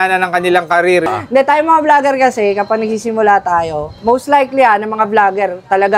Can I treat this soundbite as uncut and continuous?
no; 1 cut; at 1.3 s

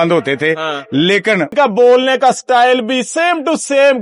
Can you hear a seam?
yes; 1 cut; at 1.5 s

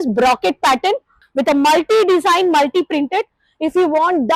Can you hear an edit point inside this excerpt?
yes; 1 cut; at 1.2 s

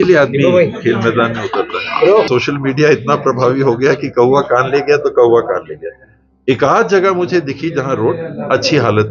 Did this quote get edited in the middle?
yes; 1 cut; at 2.3 s

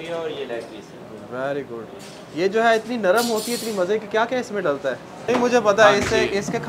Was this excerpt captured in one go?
no; 1 cut; at 5.2 s

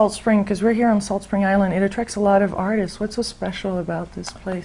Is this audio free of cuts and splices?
no; 1 cut; at 1.7 s

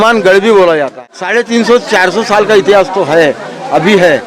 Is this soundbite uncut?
no; 1 cut; at 0.9 s

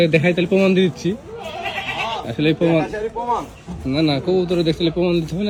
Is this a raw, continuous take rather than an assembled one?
yes; 0 cuts

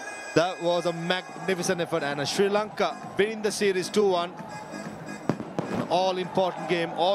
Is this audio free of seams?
yes; 0 cuts

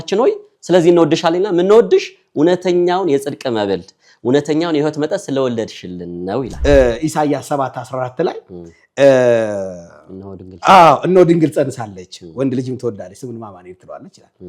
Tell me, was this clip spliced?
yes; 1 cut; at 6.5 s

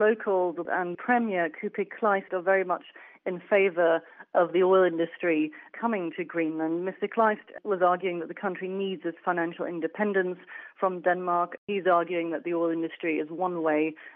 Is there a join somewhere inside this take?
yes; 3 cuts; at 1.0 s, 2.3 s, 11.7 s

